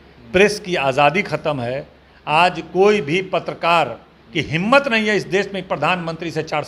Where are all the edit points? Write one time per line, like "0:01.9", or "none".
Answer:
none